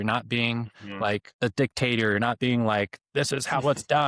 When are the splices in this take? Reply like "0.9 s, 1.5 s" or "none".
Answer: 1.3 s

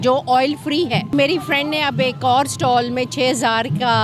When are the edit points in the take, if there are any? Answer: 1.1 s

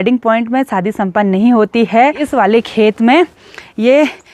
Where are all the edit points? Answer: 2.2 s

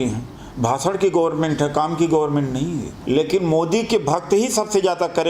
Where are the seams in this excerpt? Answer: 2.9 s

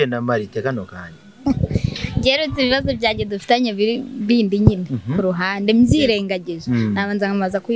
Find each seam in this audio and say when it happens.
1.4 s

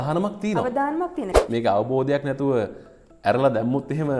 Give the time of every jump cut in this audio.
1.3 s

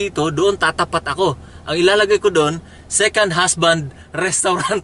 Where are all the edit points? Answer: none

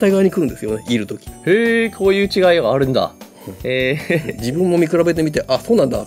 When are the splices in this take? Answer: none

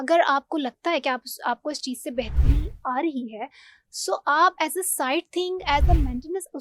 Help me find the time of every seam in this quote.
none

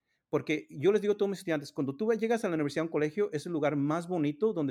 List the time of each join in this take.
none

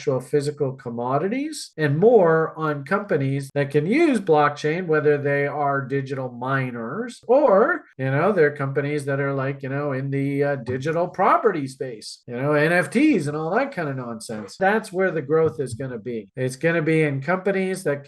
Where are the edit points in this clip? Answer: 3.4 s, 7.2 s, 14.5 s

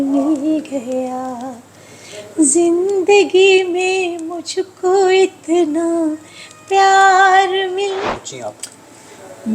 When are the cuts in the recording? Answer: 8.0 s

